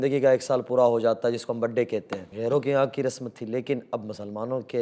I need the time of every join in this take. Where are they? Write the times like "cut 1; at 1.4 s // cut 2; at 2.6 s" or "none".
cut 1; at 2.2 s